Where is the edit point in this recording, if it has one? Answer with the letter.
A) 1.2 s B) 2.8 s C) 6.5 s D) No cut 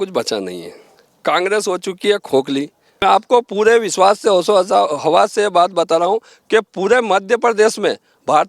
B